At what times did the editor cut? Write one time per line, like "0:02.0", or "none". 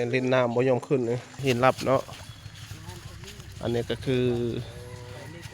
0:01.4